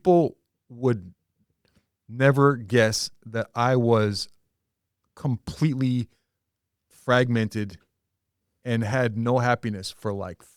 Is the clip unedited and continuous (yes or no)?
yes